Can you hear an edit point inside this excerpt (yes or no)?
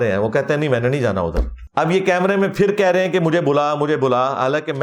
no